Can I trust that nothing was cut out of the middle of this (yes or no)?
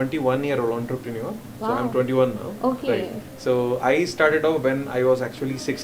yes